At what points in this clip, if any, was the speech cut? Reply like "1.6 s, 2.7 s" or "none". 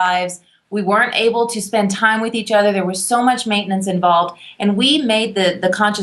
5.1 s